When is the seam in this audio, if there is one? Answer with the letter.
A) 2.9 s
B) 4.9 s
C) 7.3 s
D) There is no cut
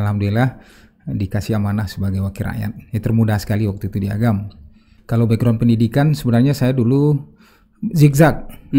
B